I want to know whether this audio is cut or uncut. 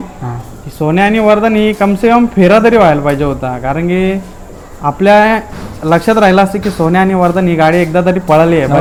uncut